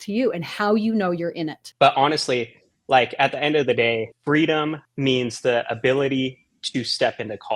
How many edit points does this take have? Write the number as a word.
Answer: three